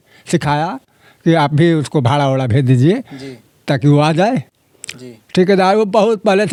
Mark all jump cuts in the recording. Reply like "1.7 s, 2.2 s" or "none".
none